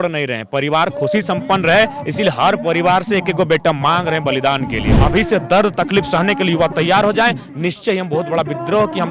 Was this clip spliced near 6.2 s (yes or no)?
no